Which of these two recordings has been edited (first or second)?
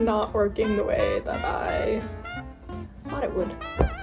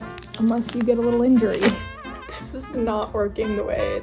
second